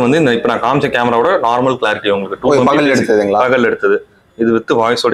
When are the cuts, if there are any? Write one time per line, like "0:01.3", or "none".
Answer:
none